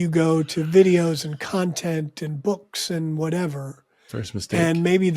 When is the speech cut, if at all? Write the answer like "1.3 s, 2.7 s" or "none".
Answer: none